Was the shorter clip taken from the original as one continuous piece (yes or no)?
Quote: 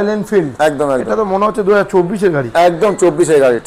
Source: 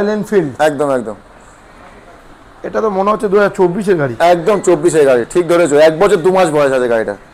no